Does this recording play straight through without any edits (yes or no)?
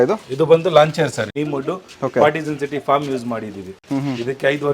no